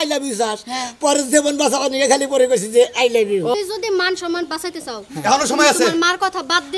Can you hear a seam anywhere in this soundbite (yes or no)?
yes